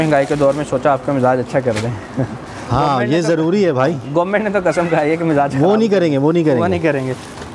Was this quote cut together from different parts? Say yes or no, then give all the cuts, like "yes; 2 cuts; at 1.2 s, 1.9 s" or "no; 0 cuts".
no; 0 cuts